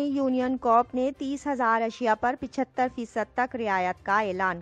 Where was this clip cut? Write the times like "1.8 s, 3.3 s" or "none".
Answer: none